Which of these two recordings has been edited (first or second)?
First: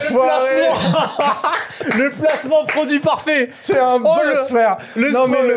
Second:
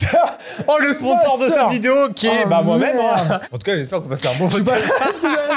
second